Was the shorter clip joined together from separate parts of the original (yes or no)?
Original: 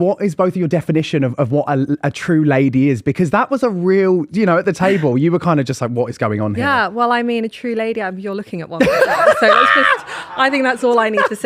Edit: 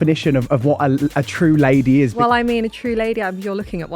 yes